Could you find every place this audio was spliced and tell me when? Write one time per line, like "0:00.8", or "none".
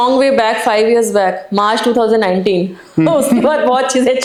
none